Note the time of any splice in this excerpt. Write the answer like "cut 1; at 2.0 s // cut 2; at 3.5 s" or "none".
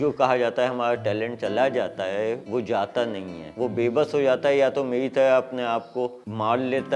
none